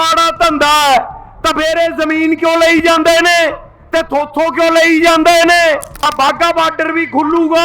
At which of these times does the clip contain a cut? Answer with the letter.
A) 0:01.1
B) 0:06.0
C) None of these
B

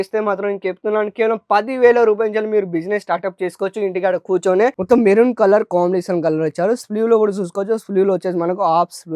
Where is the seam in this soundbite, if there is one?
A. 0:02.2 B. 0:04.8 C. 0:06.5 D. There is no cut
B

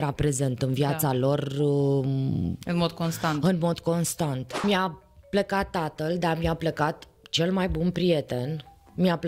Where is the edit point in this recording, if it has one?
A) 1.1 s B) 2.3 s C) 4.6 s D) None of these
C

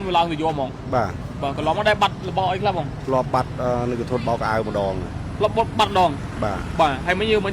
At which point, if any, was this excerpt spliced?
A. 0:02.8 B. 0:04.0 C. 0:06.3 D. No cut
D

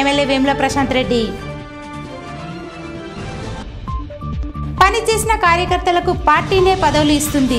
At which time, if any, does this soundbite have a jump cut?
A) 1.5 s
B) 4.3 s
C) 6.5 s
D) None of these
D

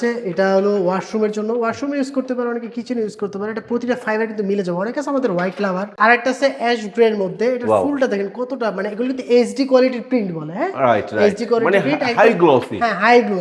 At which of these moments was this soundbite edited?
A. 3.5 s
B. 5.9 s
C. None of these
B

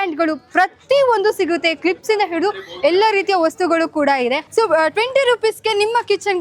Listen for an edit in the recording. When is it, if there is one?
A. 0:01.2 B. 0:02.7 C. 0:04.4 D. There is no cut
C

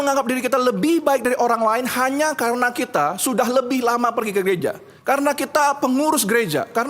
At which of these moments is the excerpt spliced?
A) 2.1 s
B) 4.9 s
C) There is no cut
B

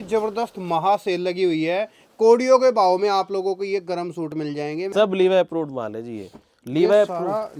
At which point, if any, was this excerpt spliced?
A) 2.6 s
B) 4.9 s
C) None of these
B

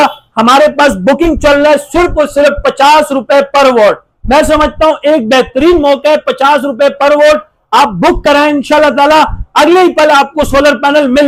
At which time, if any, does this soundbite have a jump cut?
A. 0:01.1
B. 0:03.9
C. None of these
C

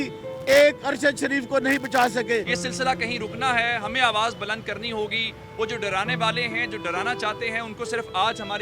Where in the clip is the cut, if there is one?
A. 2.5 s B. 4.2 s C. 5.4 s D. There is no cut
A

